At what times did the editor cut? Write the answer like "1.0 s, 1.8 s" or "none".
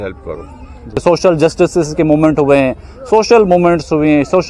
1.0 s